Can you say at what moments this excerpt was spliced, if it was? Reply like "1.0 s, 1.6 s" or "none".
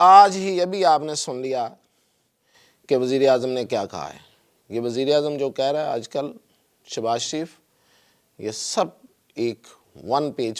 none